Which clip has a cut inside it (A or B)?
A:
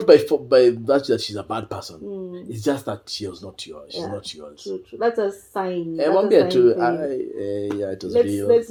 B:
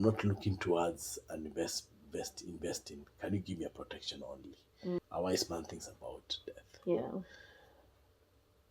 B